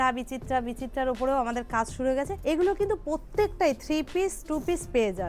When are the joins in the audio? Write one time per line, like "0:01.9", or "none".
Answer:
0:02.3